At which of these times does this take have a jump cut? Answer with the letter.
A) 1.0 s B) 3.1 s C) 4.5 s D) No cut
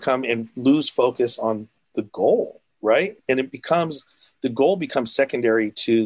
B